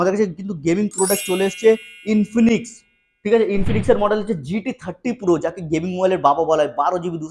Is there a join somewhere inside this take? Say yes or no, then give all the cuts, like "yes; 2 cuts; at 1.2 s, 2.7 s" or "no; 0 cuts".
no; 0 cuts